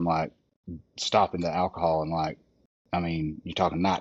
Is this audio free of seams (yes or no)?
yes